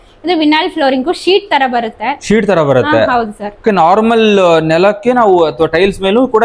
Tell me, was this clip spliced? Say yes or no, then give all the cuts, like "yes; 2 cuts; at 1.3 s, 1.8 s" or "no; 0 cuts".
no; 0 cuts